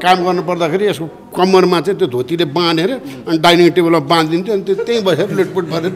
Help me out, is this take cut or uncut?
uncut